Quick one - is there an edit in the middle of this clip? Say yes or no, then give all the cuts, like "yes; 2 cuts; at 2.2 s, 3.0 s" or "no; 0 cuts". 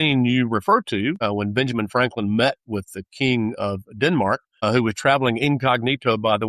yes; 2 cuts; at 1.2 s, 4.5 s